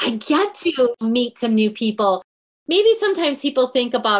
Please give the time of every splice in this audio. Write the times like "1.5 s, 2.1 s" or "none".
1.0 s, 2.5 s